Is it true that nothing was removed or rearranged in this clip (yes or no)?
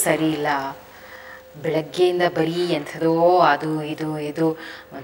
yes